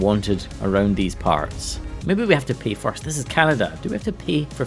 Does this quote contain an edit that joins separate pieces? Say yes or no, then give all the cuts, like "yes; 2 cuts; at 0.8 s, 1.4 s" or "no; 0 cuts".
yes; 1 cut; at 1.9 s